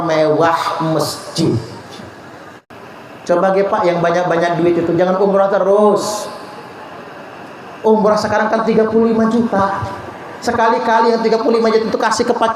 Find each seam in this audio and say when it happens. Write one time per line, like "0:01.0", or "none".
0:02.5